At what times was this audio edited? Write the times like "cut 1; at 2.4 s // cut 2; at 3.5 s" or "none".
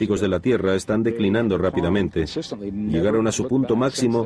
cut 1; at 1.9 s